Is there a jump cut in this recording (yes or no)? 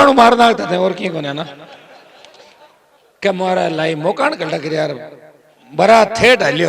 no